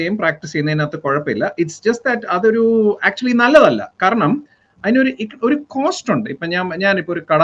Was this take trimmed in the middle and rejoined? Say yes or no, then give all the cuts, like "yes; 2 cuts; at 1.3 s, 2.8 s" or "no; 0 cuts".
no; 0 cuts